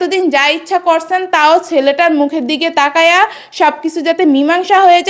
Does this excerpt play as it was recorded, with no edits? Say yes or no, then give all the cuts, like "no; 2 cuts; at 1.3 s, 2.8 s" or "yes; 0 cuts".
yes; 0 cuts